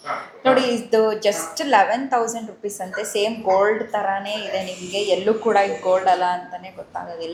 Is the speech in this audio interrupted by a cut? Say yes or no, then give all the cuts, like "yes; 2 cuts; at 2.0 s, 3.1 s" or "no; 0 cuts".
no; 0 cuts